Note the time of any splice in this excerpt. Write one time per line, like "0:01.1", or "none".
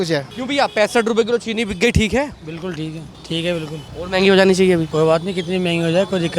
0:04.9